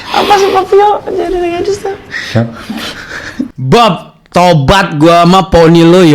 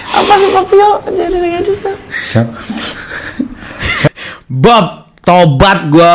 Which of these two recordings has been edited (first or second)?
first